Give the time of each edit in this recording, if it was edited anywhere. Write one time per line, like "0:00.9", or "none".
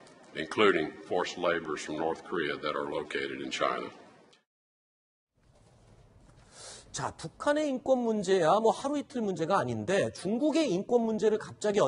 0:09.3